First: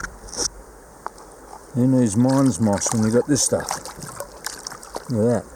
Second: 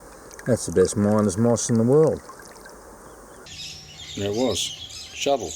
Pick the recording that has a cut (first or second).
second